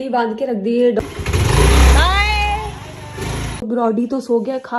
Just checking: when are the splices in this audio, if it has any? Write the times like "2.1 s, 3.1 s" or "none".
1.0 s, 3.6 s